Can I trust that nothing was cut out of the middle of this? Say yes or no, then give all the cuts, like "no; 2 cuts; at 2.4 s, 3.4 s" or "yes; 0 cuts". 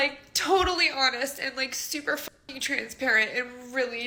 yes; 0 cuts